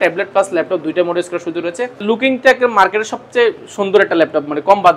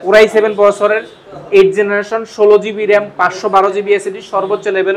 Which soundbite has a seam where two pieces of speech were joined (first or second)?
first